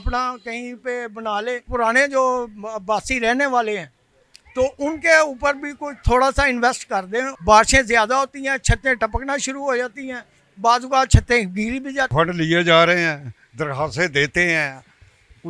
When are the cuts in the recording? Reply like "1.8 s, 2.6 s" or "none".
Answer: 1.6 s, 7.3 s, 12.1 s